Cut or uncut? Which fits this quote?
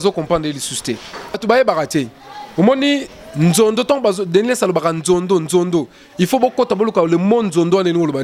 cut